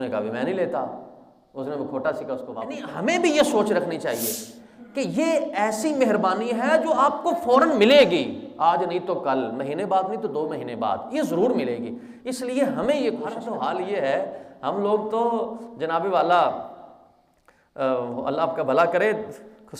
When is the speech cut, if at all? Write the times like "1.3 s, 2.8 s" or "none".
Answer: 2.8 s, 13.4 s

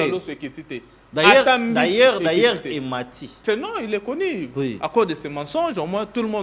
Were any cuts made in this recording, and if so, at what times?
3.2 s

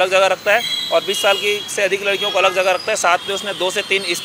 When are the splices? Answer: none

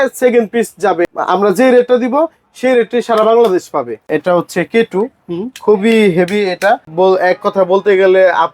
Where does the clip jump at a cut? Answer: 1.0 s, 4.1 s, 6.9 s

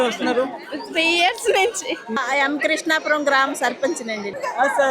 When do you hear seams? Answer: 2.1 s

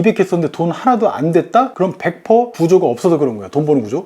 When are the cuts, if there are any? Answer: 1.7 s

